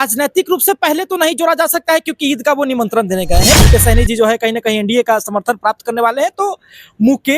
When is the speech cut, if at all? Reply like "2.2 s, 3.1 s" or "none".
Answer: 3.6 s